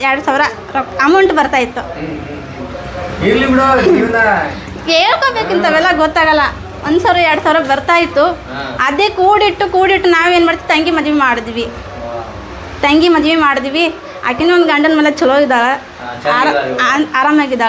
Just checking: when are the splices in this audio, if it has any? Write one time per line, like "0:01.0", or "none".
none